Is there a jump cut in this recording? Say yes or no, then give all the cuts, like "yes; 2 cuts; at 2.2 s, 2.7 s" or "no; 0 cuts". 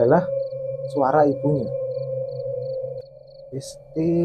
yes; 1 cut; at 3.0 s